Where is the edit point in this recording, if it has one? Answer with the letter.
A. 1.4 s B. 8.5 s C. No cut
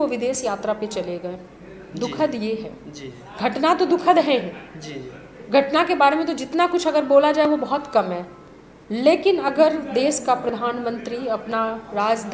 C